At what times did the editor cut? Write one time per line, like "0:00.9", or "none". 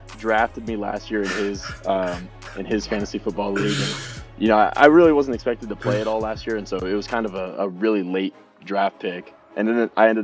none